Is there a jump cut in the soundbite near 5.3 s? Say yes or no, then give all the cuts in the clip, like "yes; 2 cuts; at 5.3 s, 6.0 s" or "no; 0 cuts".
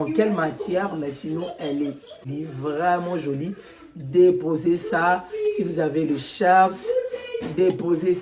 no; 1 cut; at 2.3 s